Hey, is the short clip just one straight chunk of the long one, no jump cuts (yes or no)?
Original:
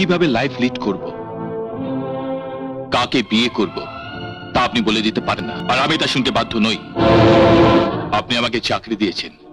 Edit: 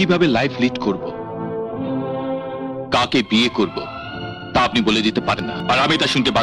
yes